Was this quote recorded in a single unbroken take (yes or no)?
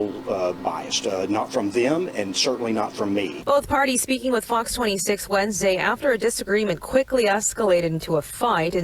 no